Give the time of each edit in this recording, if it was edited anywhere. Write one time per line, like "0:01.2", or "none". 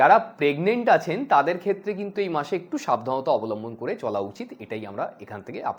none